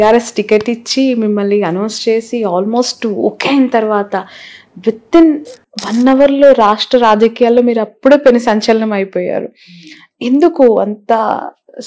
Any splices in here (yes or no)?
no